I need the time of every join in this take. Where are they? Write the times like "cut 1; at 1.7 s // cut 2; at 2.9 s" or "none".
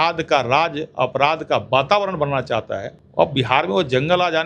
cut 1; at 3.0 s